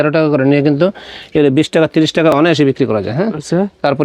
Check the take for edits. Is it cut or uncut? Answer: uncut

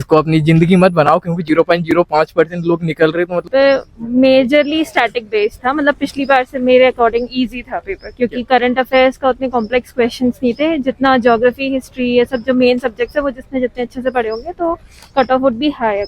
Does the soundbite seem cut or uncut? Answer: cut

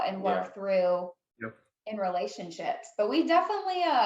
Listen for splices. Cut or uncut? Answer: uncut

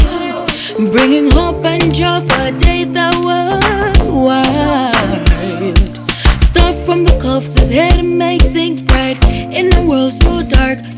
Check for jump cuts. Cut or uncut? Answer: uncut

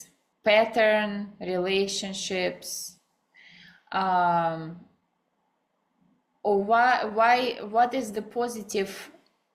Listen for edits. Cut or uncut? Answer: uncut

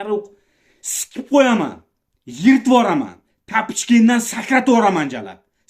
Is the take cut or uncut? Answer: uncut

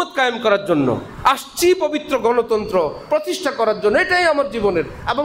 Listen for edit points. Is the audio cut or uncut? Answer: uncut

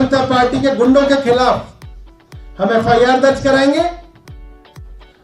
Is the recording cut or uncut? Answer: uncut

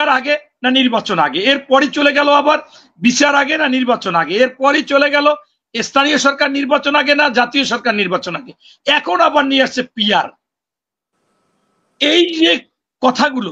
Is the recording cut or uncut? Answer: uncut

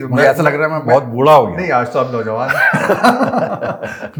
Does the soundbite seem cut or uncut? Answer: uncut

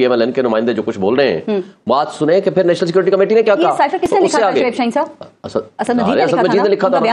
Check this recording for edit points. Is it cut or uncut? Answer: uncut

